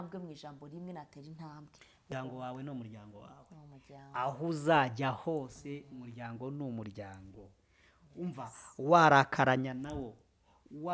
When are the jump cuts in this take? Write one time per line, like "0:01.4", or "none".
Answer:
0:02.1